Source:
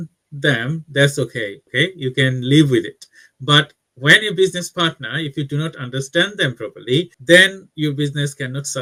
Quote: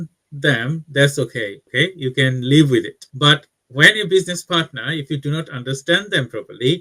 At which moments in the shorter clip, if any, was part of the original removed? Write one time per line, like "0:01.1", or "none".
0:03.0